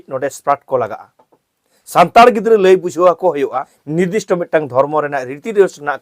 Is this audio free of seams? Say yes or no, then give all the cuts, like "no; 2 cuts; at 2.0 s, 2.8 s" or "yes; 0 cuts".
no; 1 cut; at 3.9 s